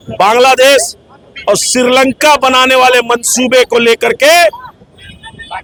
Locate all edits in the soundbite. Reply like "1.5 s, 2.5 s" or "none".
none